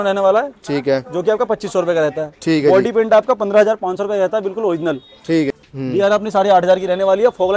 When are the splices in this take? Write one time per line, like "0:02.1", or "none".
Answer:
0:05.6